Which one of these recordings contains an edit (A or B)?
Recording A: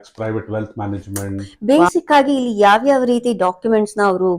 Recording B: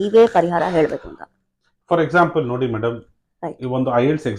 A